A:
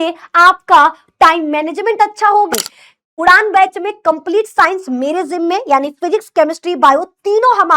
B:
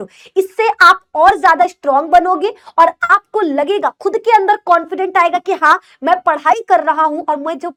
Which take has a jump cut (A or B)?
A